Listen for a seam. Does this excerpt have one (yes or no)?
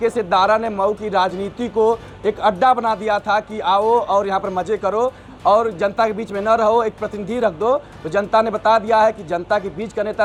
no